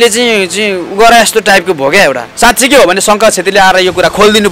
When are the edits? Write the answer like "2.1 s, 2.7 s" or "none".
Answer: 2.3 s